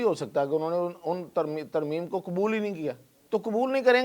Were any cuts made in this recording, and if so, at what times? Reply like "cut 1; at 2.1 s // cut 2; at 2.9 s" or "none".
cut 1; at 3.1 s